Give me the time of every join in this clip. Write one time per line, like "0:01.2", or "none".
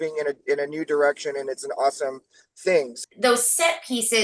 0:02.9